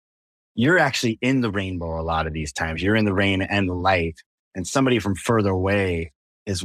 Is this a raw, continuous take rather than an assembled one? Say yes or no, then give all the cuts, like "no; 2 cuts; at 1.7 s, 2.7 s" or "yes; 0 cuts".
yes; 0 cuts